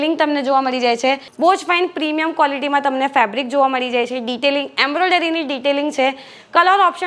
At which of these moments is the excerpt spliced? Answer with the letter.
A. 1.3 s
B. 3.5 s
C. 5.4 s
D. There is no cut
A